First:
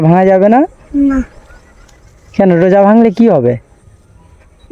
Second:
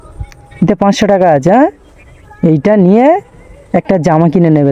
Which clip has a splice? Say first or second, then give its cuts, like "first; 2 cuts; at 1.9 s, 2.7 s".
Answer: first; 1 cut; at 1.6 s